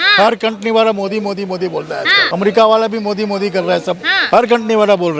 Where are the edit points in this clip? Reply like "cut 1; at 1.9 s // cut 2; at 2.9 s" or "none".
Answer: cut 1; at 2.2 s

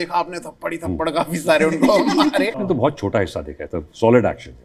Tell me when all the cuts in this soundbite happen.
cut 1; at 2.6 s

